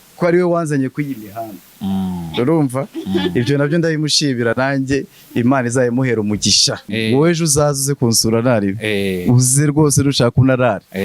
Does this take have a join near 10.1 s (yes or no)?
no